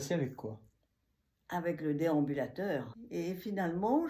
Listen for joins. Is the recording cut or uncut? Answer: cut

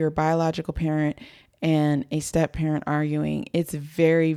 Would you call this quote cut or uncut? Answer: uncut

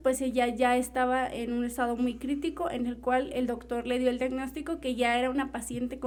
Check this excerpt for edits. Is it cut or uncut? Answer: uncut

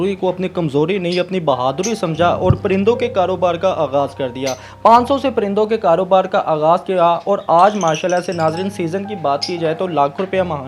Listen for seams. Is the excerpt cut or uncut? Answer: uncut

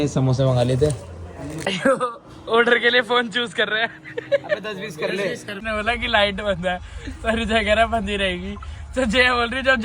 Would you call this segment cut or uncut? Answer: cut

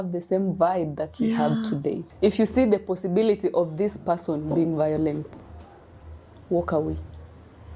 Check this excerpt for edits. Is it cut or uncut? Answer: cut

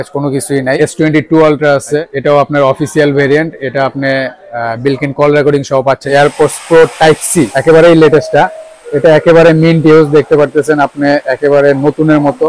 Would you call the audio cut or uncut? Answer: cut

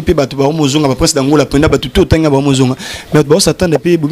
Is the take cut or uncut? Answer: uncut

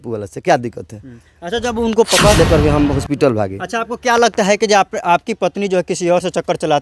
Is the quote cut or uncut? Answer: cut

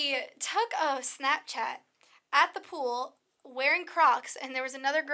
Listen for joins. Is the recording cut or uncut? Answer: uncut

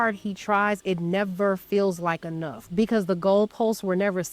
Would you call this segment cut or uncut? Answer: cut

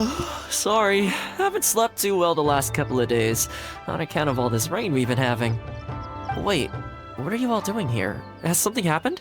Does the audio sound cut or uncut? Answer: cut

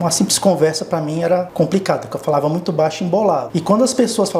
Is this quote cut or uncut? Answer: cut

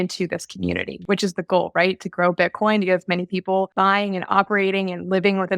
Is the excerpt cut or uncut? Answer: cut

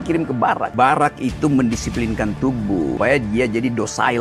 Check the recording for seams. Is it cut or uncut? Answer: uncut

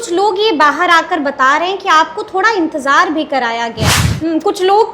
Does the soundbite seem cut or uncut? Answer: cut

